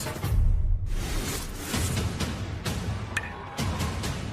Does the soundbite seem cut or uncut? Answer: cut